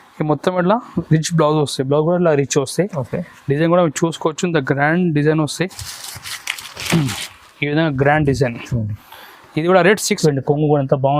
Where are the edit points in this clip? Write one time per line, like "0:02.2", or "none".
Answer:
0:10.2